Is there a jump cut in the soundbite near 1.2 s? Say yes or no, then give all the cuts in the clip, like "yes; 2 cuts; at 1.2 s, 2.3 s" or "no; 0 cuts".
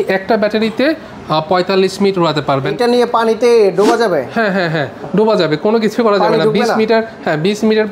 no; 1 cut; at 2.7 s